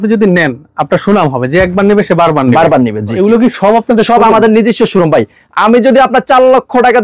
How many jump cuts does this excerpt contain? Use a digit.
1